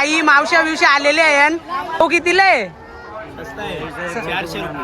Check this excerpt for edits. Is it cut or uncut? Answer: cut